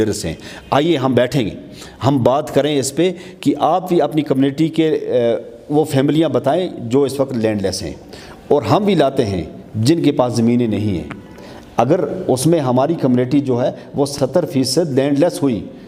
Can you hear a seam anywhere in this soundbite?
no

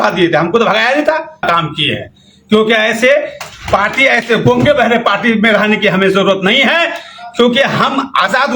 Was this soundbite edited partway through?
no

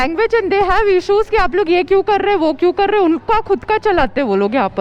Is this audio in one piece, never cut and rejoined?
yes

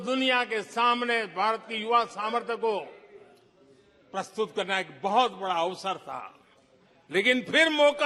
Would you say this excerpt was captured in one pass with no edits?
yes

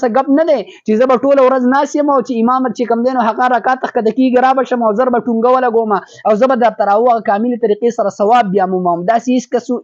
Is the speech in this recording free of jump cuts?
yes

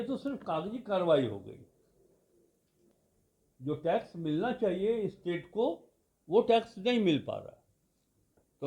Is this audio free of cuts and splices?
no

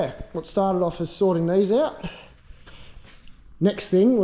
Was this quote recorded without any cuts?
yes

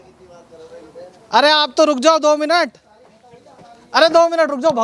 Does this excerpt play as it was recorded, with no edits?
yes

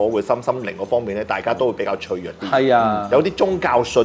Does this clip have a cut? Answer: no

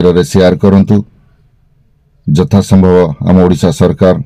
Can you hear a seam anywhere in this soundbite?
no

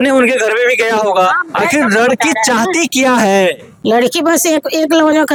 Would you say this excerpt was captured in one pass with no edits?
yes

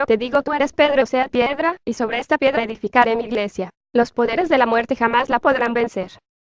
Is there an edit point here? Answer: yes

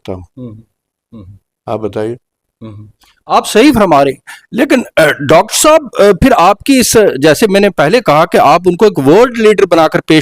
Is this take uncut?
yes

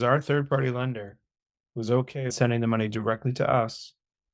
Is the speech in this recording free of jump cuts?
no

